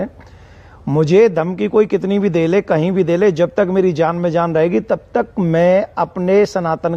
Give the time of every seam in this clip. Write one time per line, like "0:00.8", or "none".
none